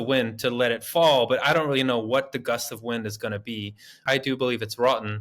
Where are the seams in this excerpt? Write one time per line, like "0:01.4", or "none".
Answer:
0:04.0